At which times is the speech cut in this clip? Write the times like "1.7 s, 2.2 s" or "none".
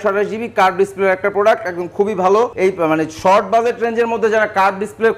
2.5 s